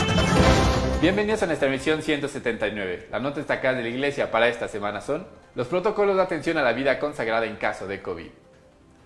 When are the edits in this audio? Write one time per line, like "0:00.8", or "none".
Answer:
none